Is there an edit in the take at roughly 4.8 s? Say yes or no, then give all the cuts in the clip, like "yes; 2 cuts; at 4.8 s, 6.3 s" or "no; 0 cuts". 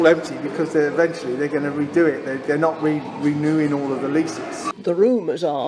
yes; 1 cut; at 4.8 s